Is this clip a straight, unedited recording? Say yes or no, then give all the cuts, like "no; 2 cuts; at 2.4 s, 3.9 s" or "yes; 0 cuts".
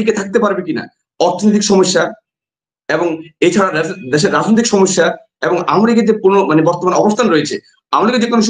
yes; 0 cuts